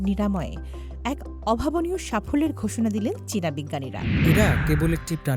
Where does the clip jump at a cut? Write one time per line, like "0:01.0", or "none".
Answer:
0:04.1